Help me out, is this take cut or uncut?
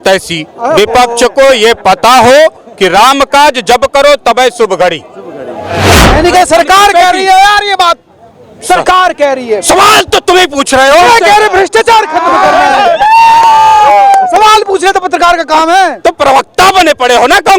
cut